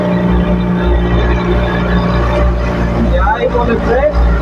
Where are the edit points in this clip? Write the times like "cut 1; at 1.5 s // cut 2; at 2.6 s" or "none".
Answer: none